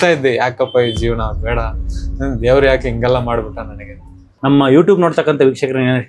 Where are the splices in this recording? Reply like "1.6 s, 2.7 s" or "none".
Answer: 4.3 s